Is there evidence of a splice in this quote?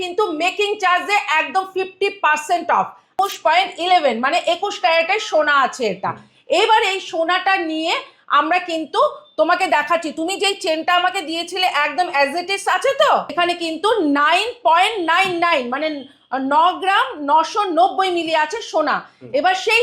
yes; 2 cuts; at 3.1 s, 13.3 s

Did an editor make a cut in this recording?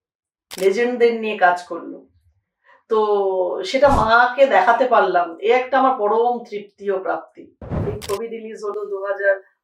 yes; 1 cut; at 7.7 s

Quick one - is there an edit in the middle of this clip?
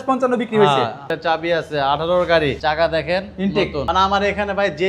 yes; 3 cuts; at 1.1 s, 2.6 s, 3.8 s

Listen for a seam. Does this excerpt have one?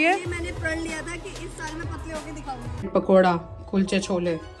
yes; 1 cut; at 2.9 s

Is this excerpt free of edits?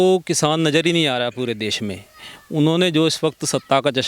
yes; 0 cuts

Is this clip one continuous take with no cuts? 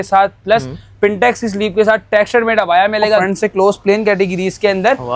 no; 1 cut; at 3.2 s

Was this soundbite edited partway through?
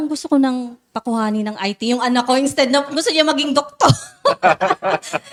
no; 0 cuts

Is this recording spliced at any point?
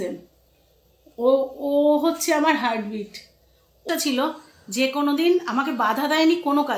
yes; 1 cut; at 3.8 s

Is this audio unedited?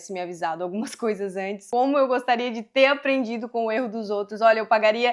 no; 1 cut; at 1.6 s

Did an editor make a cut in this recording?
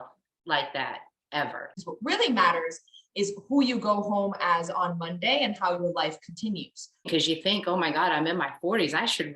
yes; 2 cuts; at 1.8 s, 7.1 s

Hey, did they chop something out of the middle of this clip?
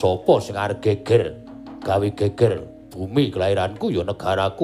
no; 0 cuts

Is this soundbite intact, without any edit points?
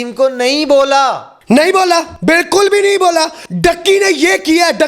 no; 3 cuts; at 1.3 s, 2.1 s, 3.4 s

